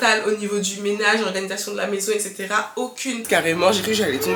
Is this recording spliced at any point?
yes; 1 cut; at 3.2 s

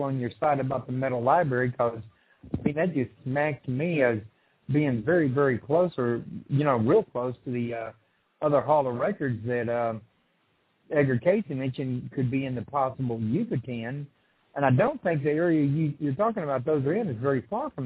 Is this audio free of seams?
no; 1 cut; at 2.4 s

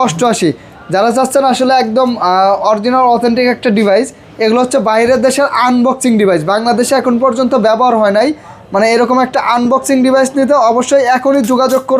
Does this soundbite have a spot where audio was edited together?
no; 0 cuts

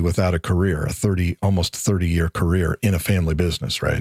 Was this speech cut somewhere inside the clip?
no; 0 cuts

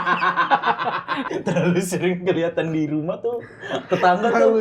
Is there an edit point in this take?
yes; 1 cut; at 1.3 s

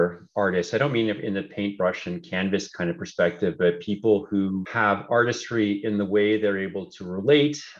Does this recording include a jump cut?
yes; 1 cut; at 4.7 s

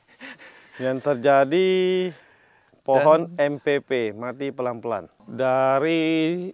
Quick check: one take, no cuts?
no; 1 cut; at 5.2 s

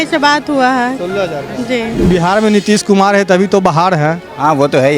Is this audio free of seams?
no; 1 cut; at 2.0 s

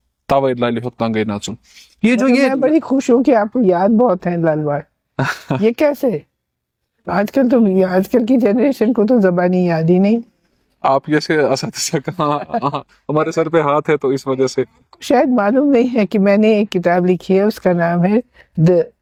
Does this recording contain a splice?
no; 0 cuts

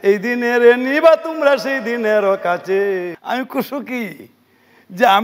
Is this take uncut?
no; 1 cut; at 3.1 s

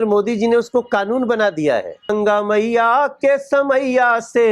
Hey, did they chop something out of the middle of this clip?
yes; 1 cut; at 2.1 s

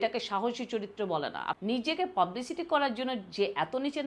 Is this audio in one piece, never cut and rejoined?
no; 1 cut; at 1.5 s

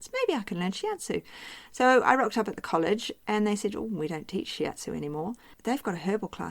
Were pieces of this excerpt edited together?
yes; 1 cut; at 5.5 s

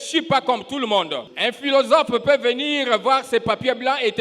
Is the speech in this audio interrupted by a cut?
yes; 1 cut; at 1.2 s

